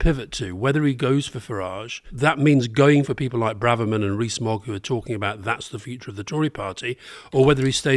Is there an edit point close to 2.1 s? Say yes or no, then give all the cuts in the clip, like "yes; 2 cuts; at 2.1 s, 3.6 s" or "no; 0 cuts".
yes; 1 cut; at 2.1 s